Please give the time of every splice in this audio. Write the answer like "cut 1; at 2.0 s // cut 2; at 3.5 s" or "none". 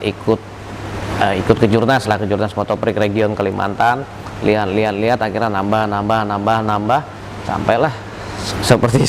none